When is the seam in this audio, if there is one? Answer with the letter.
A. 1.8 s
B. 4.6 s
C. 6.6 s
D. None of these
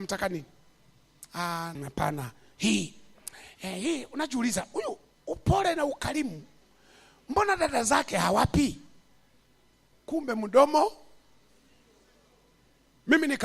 A